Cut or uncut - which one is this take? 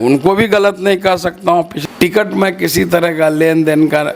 cut